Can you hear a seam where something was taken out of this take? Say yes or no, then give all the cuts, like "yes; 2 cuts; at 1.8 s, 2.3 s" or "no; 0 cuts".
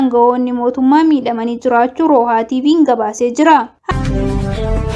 yes; 1 cut; at 3.8 s